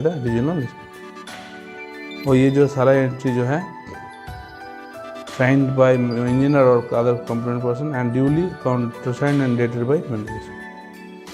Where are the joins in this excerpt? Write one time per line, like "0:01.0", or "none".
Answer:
0:03.6
0:05.4
0:10.3